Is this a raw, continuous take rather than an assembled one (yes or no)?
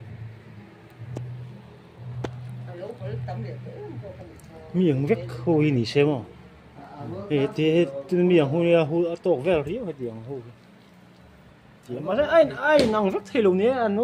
yes